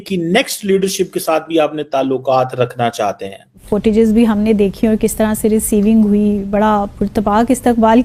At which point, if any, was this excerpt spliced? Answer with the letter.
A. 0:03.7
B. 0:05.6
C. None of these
A